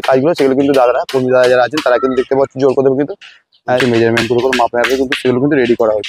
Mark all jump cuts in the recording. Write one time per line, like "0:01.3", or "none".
0:03.8